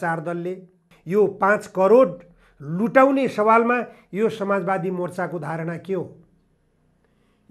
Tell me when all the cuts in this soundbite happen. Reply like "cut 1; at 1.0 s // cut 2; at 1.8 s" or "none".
cut 1; at 0.9 s